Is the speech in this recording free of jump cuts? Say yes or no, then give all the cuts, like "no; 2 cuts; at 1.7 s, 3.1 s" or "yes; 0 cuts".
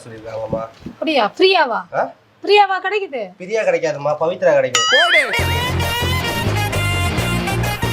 yes; 0 cuts